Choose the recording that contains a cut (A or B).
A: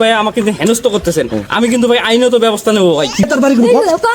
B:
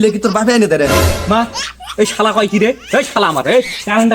A